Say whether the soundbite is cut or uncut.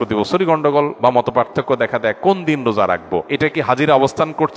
cut